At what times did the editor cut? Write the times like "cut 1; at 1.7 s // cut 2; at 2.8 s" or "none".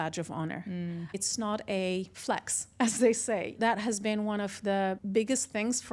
cut 1; at 1.2 s // cut 2; at 2.1 s // cut 3; at 3.6 s // cut 4; at 5.0 s